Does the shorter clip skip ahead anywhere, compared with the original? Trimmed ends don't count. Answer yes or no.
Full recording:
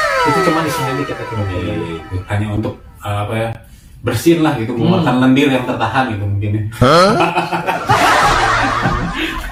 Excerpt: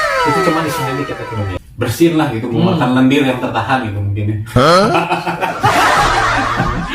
yes